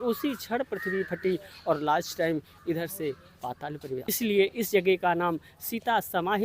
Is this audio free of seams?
no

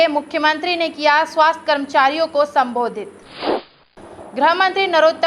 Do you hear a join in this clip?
yes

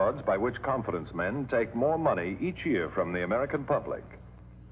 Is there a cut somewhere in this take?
yes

